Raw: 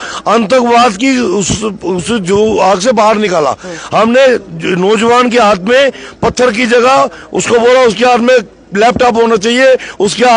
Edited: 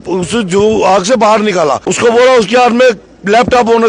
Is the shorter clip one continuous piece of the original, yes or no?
no